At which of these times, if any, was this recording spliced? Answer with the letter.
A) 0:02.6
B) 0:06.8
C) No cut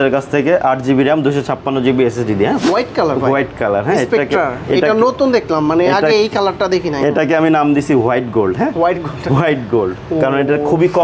A